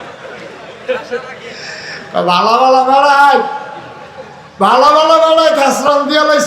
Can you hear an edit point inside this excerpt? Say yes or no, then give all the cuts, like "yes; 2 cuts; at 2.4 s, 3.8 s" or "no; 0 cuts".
no; 0 cuts